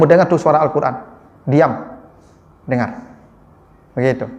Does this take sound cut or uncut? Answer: uncut